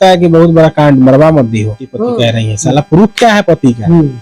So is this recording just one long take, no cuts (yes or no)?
no